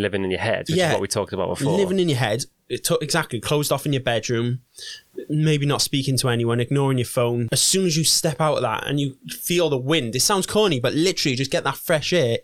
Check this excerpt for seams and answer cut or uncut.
cut